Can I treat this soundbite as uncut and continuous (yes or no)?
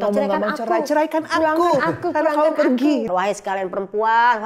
no